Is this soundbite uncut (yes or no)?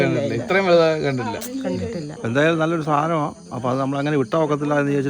no